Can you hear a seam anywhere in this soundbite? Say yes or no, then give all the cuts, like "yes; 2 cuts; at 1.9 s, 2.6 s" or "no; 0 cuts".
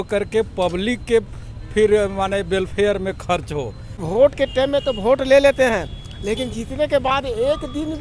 yes; 1 cut; at 4.0 s